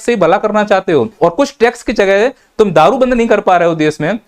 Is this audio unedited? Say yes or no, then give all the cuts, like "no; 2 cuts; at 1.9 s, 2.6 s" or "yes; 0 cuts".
no; 1 cut; at 1.1 s